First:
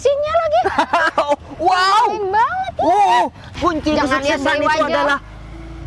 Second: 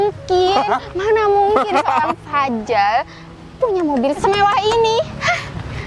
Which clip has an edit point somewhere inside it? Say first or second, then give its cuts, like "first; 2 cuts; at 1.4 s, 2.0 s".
first; 1 cut; at 3.5 s